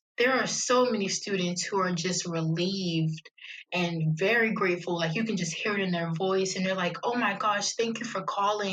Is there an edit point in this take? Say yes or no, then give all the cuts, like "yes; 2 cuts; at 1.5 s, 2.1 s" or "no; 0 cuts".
no; 0 cuts